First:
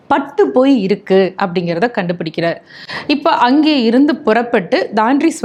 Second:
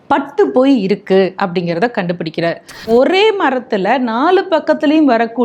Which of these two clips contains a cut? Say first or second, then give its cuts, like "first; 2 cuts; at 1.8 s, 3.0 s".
second; 1 cut; at 2.9 s